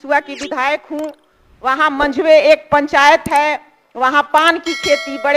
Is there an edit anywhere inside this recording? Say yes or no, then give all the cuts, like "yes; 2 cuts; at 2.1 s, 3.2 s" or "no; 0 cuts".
no; 0 cuts